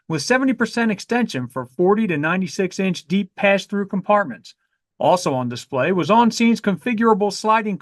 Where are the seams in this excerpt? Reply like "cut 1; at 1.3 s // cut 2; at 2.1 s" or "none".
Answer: none